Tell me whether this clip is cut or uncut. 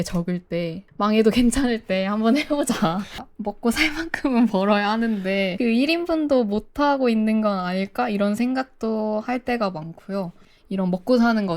cut